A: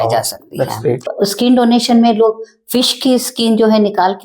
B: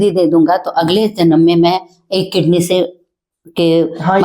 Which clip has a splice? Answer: A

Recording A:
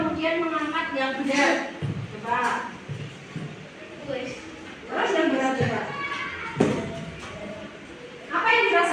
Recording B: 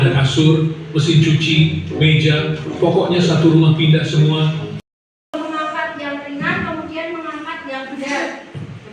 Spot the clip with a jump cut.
B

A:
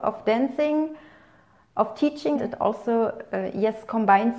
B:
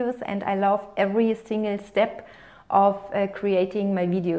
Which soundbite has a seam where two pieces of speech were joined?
A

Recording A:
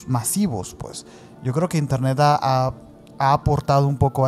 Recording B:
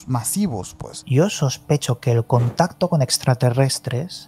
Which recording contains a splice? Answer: B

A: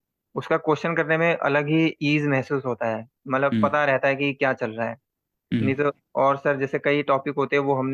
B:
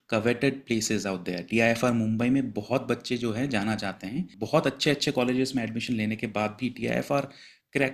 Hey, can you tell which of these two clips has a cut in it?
B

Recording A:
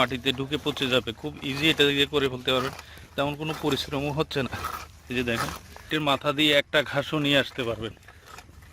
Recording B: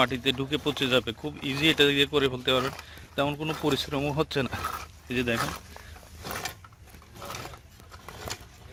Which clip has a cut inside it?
A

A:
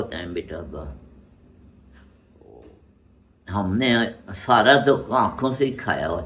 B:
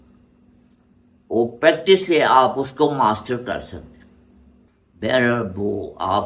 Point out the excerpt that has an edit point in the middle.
B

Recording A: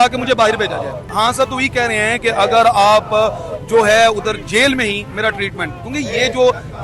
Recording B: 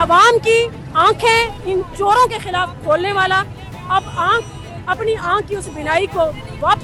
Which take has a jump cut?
A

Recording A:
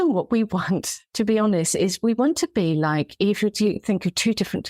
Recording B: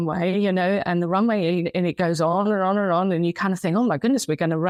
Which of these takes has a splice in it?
A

